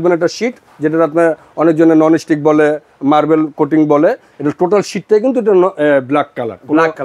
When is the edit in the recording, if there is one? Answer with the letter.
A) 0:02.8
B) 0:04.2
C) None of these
C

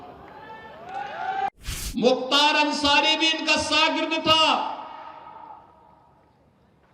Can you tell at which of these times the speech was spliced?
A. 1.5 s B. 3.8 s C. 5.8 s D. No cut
A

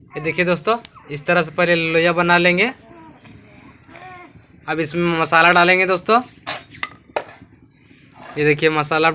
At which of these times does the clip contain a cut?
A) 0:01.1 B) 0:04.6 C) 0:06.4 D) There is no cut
D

